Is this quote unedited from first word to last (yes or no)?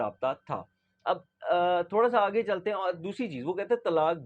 yes